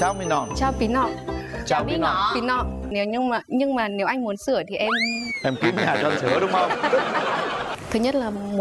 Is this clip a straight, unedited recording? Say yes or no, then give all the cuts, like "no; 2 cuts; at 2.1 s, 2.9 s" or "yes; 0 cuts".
no; 2 cuts; at 2.9 s, 7.7 s